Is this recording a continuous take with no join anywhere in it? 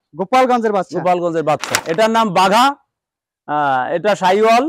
no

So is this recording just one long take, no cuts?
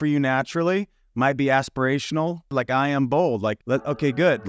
no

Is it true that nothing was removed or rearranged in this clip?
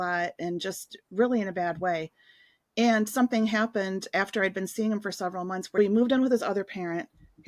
no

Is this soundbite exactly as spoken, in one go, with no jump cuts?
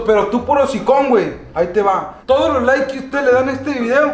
yes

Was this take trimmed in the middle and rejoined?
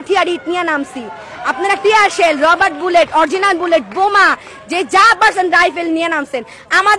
no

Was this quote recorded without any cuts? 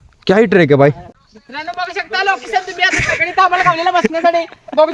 no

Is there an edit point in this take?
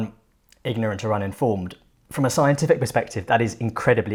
no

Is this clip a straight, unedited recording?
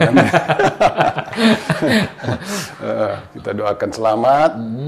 yes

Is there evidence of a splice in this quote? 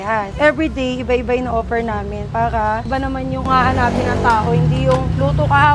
no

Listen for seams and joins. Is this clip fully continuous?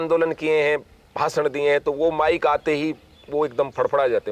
yes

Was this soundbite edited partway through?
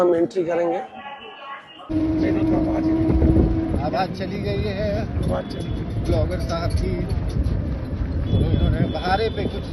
yes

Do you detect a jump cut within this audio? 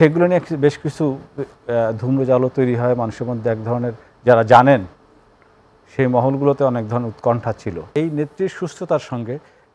yes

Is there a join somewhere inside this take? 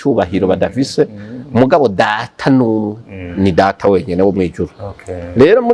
no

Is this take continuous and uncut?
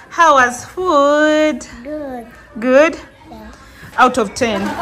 no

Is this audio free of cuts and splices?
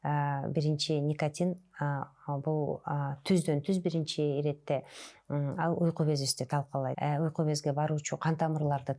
no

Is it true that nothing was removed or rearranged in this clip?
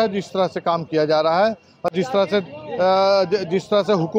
yes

